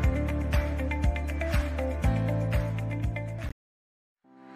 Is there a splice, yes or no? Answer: yes